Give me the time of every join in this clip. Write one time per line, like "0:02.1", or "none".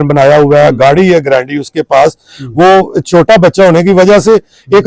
none